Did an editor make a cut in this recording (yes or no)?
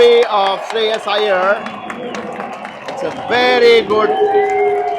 no